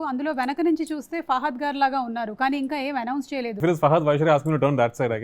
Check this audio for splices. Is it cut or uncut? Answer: cut